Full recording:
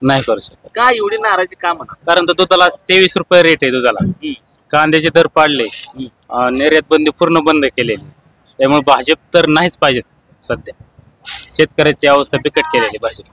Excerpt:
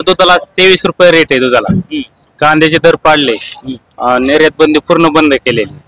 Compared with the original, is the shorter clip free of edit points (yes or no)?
yes